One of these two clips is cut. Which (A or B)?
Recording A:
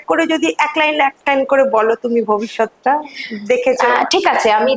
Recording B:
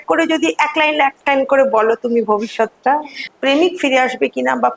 B